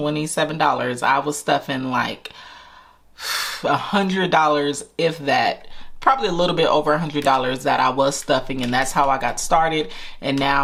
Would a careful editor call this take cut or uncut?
uncut